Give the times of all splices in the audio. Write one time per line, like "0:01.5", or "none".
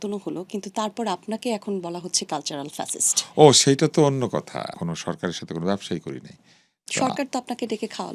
0:04.8